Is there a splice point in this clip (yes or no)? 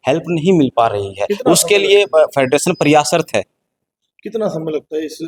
no